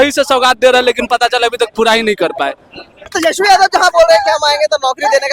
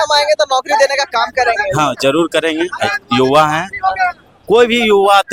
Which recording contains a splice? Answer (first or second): first